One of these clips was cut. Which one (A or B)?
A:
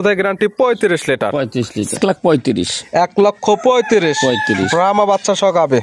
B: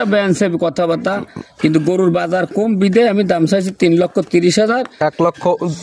A